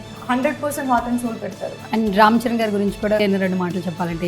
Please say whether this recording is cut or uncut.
cut